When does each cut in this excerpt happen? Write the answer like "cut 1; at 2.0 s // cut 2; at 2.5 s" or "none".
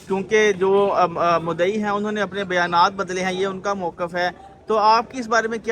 none